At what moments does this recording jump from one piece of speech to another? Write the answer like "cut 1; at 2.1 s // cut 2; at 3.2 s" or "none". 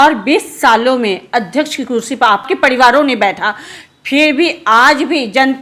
none